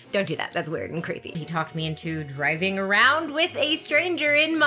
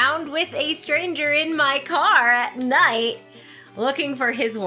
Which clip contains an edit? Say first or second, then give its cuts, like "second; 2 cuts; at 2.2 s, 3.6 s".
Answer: first; 1 cut; at 1.3 s